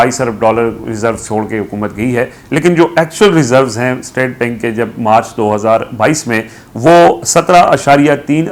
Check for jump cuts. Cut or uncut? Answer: uncut